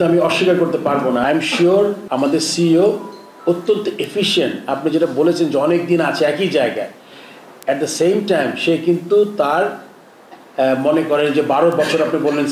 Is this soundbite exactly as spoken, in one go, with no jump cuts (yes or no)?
no